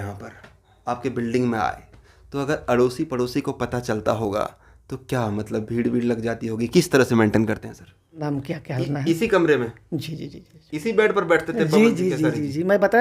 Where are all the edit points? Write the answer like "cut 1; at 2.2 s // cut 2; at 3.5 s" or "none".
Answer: cut 1; at 8.2 s